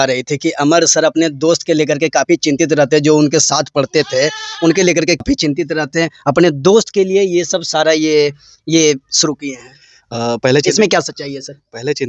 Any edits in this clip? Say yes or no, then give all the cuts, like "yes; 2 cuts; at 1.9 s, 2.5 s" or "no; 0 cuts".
no; 0 cuts